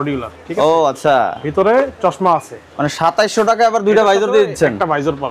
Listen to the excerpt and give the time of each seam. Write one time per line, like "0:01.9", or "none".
0:02.7